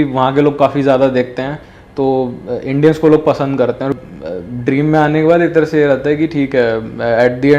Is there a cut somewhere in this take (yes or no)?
yes